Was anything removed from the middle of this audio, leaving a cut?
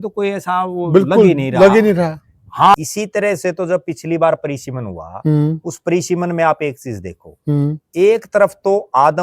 yes; 1 cut; at 2.7 s

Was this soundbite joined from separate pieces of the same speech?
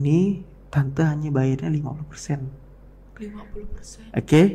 no; 0 cuts

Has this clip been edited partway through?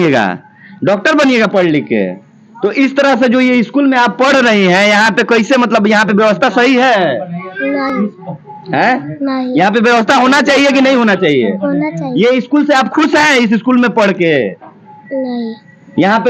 no; 0 cuts

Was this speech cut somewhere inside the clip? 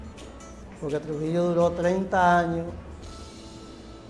yes; 1 cut; at 1.5 s

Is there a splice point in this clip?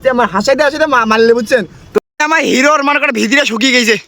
yes; 1 cut; at 2.0 s

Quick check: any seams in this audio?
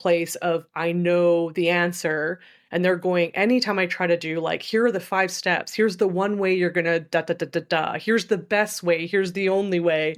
no; 0 cuts

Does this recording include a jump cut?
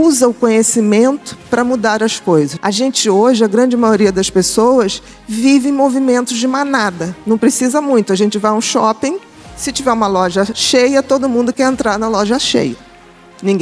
yes; 2 cuts; at 2.6 s, 7.1 s

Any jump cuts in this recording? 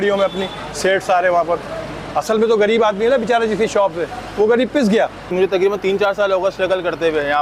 yes; 1 cut; at 5.2 s

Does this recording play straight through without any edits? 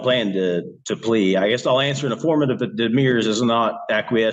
yes; 0 cuts

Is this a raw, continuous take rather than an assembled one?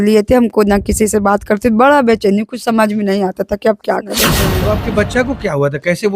no; 1 cut; at 4.5 s

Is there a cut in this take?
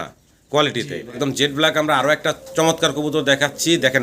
yes; 1 cut; at 1.0 s

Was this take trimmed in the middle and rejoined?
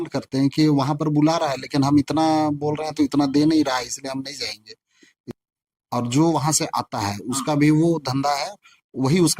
yes; 1 cut; at 5.2 s

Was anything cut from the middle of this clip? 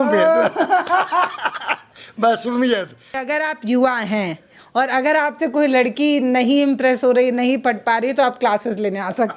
no; 0 cuts

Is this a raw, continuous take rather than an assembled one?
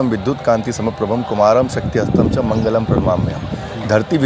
yes; 0 cuts

